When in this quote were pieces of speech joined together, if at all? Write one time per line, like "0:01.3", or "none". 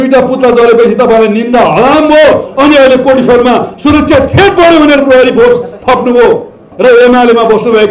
0:06.7